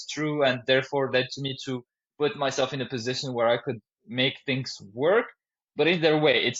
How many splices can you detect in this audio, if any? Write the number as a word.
zero